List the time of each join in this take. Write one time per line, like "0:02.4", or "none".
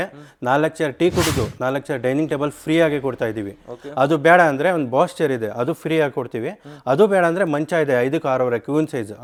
none